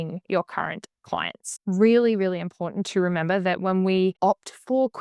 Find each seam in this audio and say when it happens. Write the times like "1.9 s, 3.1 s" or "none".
1.5 s, 4.2 s